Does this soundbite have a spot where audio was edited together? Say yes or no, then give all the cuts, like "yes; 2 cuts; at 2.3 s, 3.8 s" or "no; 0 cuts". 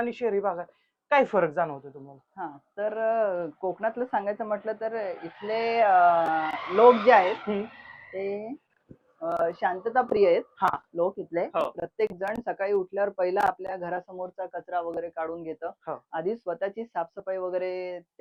no; 0 cuts